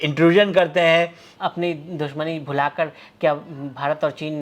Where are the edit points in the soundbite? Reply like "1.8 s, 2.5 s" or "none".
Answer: 1.2 s